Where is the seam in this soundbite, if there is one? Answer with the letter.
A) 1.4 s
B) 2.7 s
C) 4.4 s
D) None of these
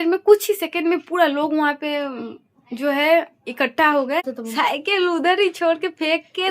C